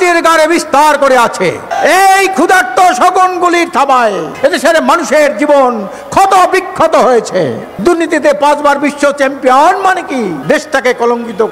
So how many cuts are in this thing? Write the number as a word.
four